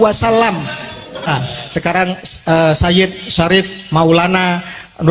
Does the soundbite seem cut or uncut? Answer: cut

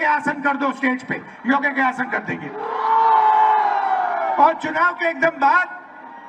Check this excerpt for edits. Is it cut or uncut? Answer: uncut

